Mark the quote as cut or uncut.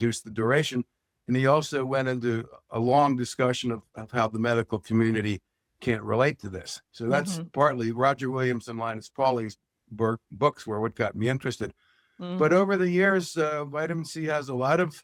uncut